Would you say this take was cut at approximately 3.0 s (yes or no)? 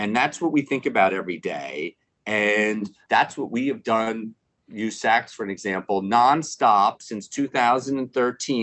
yes